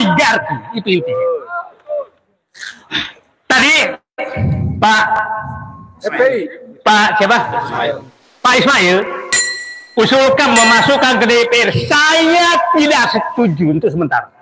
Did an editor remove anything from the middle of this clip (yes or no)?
no